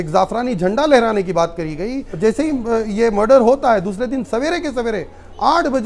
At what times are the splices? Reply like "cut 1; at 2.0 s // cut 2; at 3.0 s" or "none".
cut 1; at 2.0 s